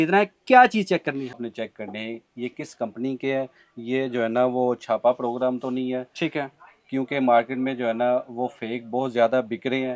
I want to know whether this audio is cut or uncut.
cut